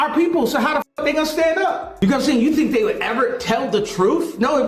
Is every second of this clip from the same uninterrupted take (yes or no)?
no